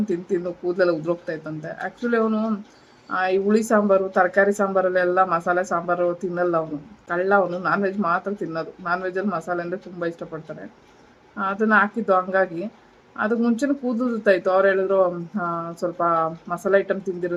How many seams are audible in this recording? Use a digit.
0